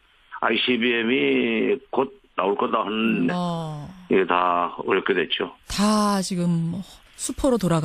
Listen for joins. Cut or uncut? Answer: uncut